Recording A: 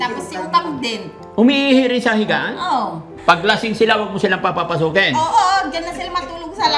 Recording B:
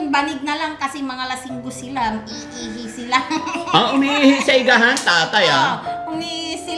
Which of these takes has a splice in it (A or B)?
A